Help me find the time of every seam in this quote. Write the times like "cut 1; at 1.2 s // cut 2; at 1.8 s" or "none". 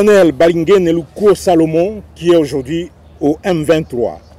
cut 1; at 3.0 s